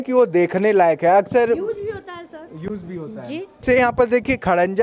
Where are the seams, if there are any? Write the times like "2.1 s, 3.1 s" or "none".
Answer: 3.6 s